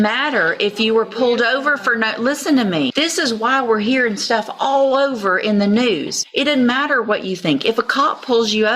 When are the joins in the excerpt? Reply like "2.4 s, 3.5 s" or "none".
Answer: 2.9 s, 6.2 s